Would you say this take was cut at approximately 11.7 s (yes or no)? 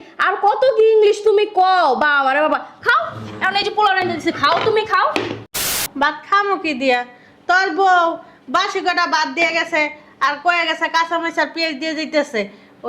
no